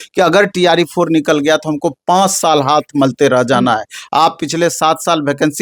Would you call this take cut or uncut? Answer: uncut